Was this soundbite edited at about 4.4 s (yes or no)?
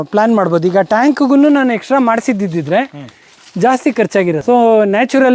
yes